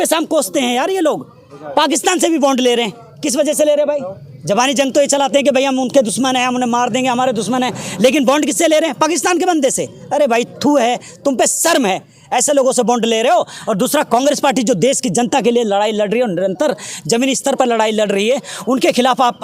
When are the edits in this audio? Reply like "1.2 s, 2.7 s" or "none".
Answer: none